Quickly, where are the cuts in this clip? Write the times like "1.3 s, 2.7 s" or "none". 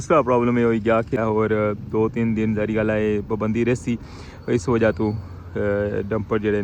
1.2 s